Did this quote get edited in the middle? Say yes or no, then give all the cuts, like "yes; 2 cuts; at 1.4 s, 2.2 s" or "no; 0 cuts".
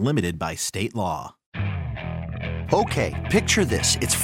yes; 1 cut; at 1.4 s